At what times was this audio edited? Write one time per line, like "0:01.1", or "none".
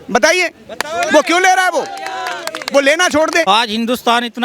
0:03.4